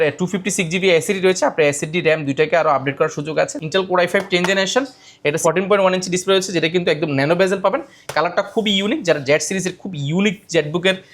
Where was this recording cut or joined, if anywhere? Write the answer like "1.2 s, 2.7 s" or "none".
3.6 s, 5.4 s